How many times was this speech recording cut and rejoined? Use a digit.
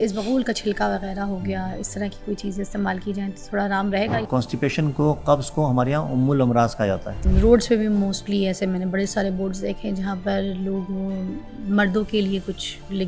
2